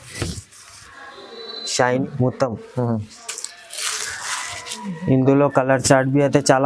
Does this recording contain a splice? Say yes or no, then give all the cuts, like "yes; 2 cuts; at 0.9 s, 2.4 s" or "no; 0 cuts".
yes; 1 cut; at 2.0 s